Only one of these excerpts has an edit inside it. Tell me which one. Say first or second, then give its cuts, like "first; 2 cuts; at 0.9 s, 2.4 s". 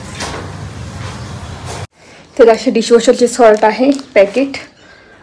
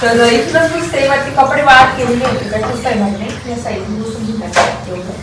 first; 1 cut; at 1.9 s